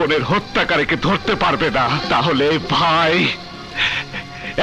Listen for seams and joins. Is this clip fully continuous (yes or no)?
no